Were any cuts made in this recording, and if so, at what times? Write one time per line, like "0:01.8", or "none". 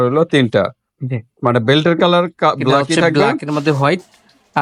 0:03.1

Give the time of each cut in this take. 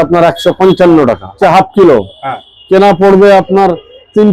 0:01.4

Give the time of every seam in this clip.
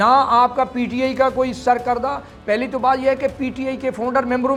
none

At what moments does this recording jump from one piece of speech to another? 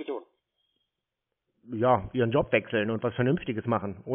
none

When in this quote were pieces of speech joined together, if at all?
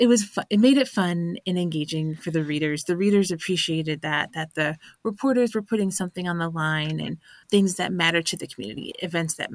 0:07.3

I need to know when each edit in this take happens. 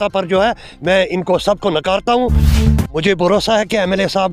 0:02.5

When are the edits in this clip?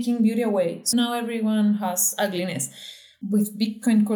0:03.1

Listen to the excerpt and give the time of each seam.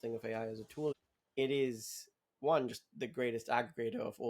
0:00.9

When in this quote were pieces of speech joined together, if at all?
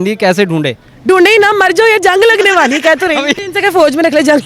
0:03.3

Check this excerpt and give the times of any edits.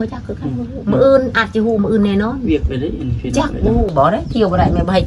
0:03.9

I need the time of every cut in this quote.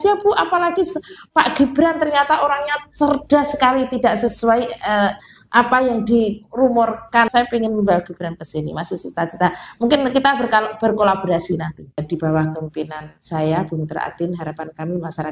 0:07.3
0:12.0

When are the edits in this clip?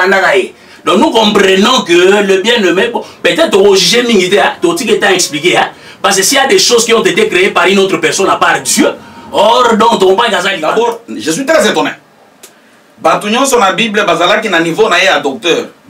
0:10.5

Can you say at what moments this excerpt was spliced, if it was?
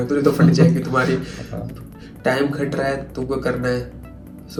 none

